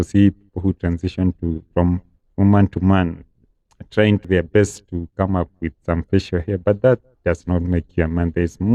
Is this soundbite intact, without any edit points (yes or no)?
yes